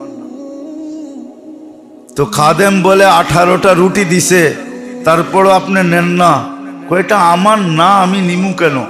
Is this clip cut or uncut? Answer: cut